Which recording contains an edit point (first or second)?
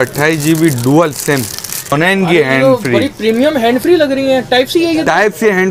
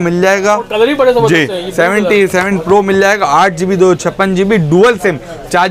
first